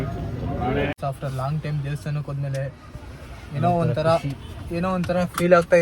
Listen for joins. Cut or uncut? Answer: cut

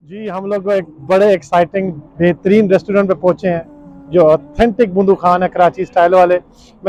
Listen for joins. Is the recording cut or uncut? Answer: uncut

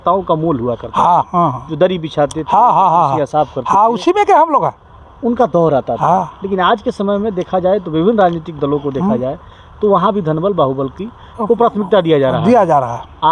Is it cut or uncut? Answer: uncut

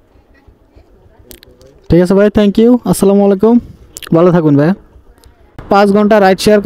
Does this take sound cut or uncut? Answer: cut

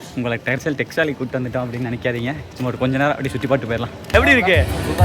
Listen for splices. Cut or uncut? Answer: cut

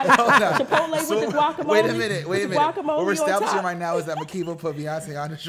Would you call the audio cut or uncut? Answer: uncut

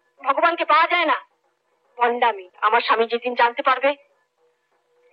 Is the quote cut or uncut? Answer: cut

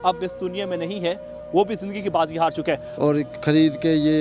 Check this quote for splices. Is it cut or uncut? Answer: cut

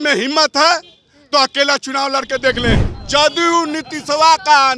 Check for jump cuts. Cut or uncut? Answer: cut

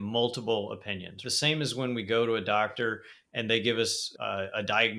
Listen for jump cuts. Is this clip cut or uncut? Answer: cut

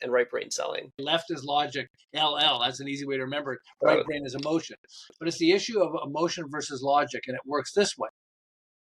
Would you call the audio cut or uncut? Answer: cut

